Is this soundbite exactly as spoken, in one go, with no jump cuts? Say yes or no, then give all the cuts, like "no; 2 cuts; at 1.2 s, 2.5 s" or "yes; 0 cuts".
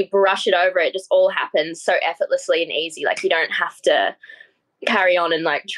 yes; 0 cuts